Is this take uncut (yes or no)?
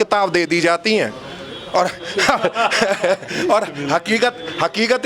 yes